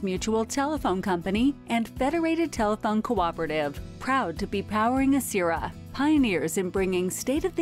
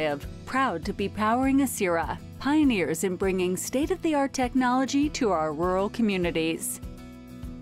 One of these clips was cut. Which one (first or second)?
second